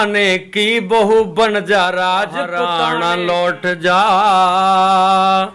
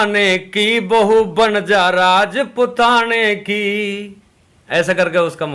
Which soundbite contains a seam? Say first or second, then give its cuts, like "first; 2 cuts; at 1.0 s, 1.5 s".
first; 1 cut; at 2.6 s